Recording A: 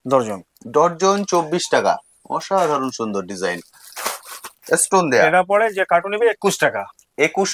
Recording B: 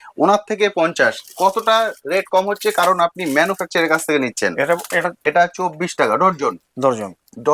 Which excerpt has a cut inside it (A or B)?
B